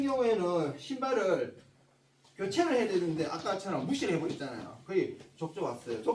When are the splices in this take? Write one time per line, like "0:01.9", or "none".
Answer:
none